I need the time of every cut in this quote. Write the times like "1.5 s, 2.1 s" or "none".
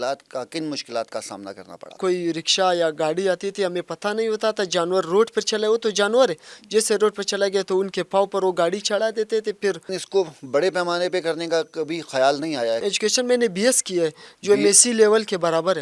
2.0 s, 10.0 s, 12.8 s